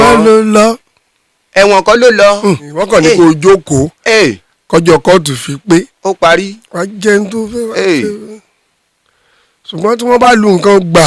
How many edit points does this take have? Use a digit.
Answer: 1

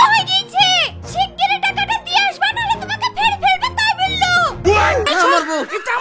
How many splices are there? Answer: 1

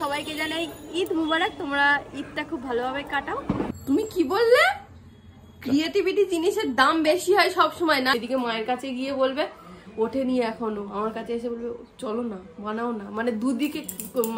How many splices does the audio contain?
2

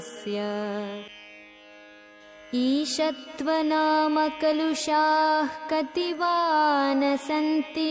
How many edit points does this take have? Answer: 1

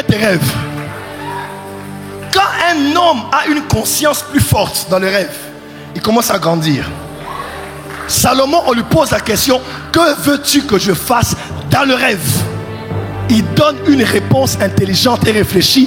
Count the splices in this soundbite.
0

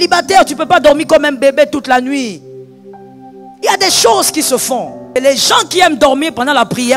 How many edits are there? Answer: 1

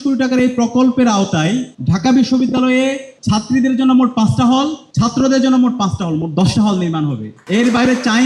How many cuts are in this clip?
4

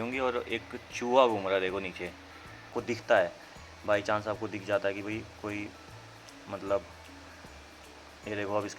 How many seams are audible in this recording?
1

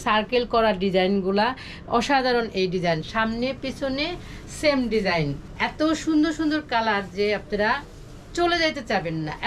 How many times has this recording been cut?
1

